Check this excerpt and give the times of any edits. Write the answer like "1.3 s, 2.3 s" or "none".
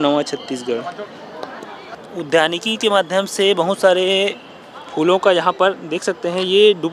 2.0 s